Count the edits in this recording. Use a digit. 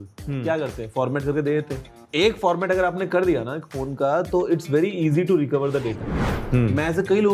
2